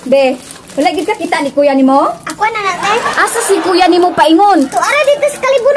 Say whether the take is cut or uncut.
uncut